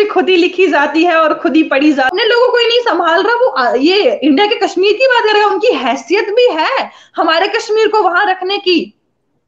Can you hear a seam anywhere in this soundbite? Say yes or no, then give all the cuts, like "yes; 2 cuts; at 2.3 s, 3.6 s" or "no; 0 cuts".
yes; 1 cut; at 2.1 s